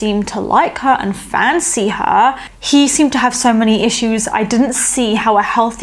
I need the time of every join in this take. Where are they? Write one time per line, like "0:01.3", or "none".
0:02.5